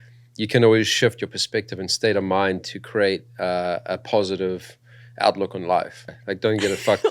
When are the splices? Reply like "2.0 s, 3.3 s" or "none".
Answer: 6.1 s